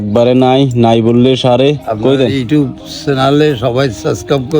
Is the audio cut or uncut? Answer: cut